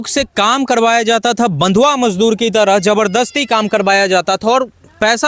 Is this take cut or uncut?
uncut